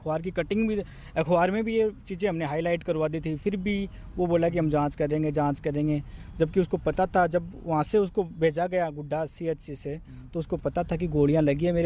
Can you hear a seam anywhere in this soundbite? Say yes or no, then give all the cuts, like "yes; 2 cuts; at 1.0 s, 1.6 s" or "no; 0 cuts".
no; 0 cuts